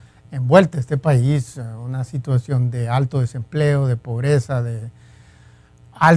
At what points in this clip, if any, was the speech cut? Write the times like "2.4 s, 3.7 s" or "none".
none